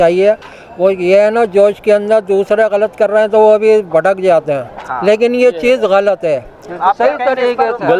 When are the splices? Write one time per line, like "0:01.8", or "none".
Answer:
none